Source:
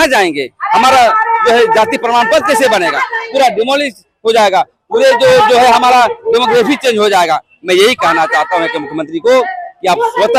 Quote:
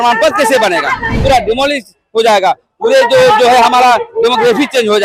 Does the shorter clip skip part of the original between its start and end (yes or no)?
no